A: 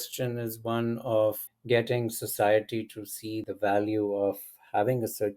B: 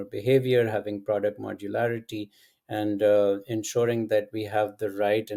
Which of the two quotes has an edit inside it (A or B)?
A